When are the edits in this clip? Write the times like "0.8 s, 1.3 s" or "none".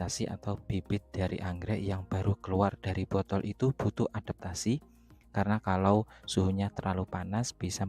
none

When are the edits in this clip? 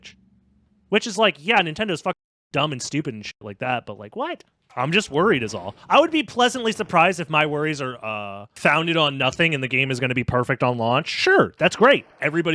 4.6 s

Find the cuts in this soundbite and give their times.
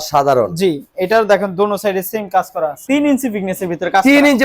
2.8 s

